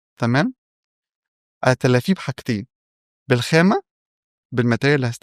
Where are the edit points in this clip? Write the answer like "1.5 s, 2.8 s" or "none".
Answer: none